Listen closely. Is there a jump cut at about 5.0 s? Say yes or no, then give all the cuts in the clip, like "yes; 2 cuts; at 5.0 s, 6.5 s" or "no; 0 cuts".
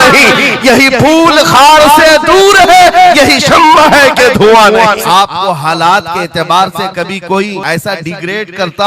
yes; 2 cuts; at 5.0 s, 7.6 s